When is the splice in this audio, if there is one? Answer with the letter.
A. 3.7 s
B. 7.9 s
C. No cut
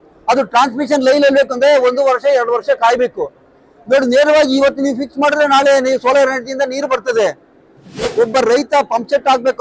B